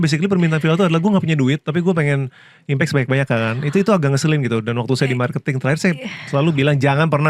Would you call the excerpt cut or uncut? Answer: uncut